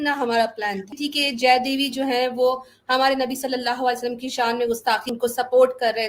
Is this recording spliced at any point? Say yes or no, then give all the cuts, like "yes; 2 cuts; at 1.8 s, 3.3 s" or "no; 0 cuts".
yes; 2 cuts; at 0.9 s, 5.2 s